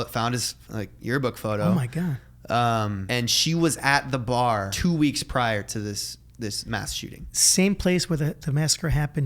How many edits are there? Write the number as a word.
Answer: two